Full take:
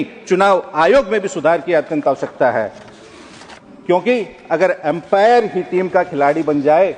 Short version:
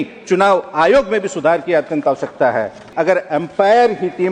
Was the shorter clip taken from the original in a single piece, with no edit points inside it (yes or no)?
no